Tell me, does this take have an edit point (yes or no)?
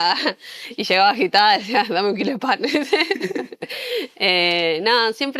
no